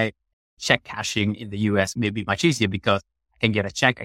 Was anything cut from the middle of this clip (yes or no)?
yes